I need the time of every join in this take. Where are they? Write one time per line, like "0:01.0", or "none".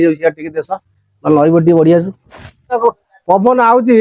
0:02.7